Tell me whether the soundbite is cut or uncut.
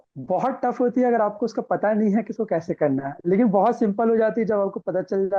uncut